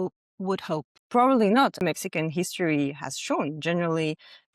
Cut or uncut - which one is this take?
cut